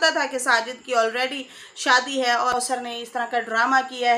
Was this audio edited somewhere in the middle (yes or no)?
yes